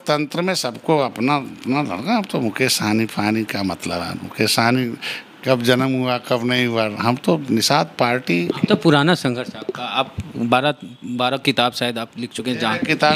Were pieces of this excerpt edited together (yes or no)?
no